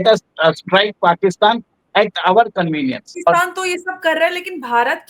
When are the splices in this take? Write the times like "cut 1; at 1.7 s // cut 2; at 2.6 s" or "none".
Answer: cut 1; at 3.1 s